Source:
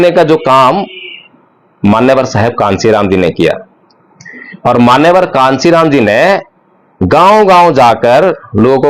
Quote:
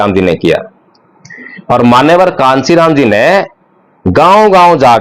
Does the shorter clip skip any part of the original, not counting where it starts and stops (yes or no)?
no